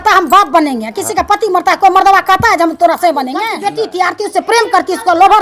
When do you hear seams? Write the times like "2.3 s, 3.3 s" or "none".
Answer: 3.5 s

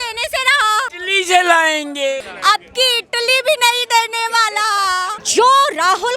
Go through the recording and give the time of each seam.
1.0 s, 2.2 s, 5.2 s

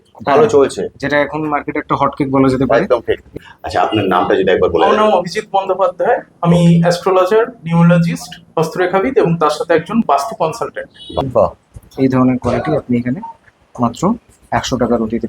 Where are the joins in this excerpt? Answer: 3.3 s, 11.2 s

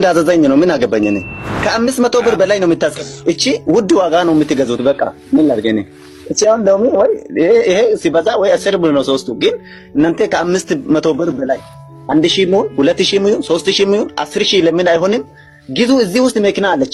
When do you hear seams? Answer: none

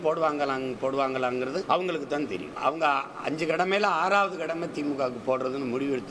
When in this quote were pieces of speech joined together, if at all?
1.6 s, 2.5 s

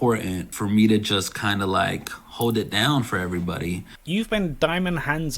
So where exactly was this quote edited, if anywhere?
3.9 s

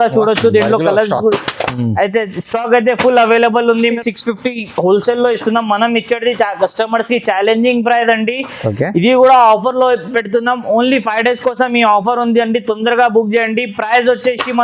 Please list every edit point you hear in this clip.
4.0 s

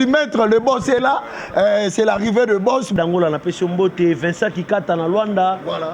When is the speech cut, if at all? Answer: 2.9 s

